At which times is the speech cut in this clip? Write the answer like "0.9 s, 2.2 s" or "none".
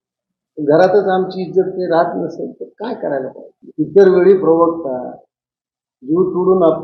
3.6 s